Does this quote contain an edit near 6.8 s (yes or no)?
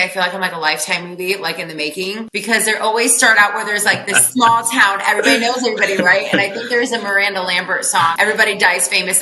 no